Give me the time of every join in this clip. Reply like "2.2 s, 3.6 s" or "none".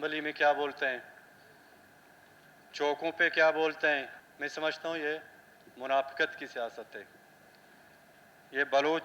4.2 s

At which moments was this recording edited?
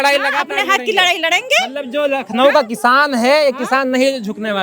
none

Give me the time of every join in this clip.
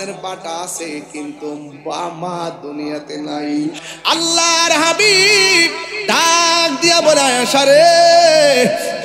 3.9 s

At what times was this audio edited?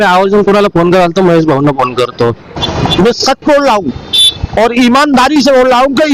2.6 s

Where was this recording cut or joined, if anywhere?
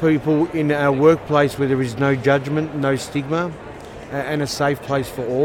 none

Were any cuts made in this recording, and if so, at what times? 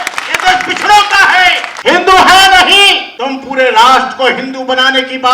1.7 s, 3.1 s

